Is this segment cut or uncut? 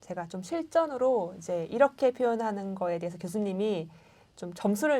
uncut